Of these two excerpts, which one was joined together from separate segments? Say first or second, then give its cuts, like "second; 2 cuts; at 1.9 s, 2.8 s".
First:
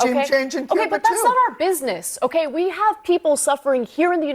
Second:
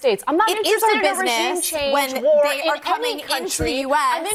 first; 1 cut; at 2.1 s